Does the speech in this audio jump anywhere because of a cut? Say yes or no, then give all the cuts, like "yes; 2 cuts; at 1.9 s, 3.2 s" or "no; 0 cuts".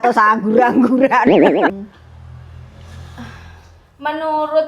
yes; 1 cut; at 1.7 s